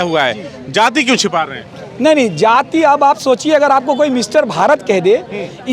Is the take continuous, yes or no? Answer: yes